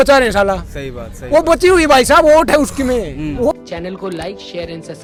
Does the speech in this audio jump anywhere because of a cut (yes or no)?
no